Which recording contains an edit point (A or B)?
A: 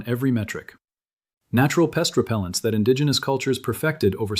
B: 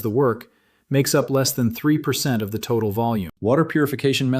B